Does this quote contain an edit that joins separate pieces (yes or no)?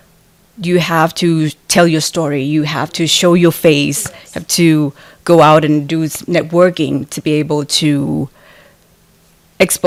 no